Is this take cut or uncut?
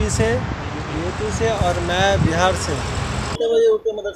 cut